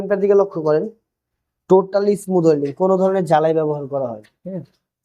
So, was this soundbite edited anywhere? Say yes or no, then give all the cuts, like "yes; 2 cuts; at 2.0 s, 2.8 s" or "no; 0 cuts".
no; 0 cuts